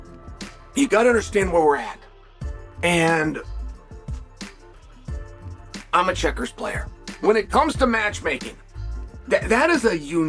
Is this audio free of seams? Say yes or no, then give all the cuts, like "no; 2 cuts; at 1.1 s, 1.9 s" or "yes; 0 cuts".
yes; 0 cuts